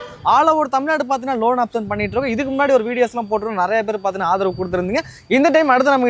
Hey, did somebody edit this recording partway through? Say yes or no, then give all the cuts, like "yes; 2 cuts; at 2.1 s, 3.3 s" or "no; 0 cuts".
no; 0 cuts